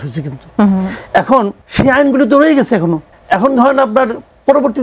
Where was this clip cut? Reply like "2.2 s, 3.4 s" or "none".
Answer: 1.6 s, 3.1 s